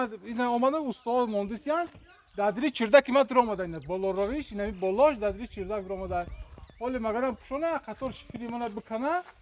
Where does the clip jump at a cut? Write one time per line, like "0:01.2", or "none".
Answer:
none